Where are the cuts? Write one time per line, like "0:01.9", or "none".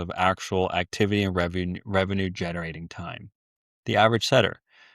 none